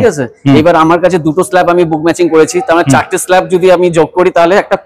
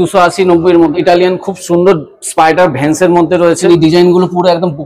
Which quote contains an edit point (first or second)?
second